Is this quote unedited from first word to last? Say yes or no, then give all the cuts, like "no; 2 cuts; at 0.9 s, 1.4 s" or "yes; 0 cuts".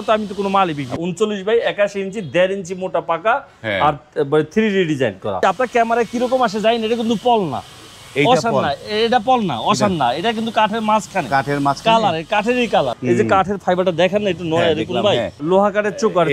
no; 4 cuts; at 0.9 s, 5.4 s, 12.9 s, 15.4 s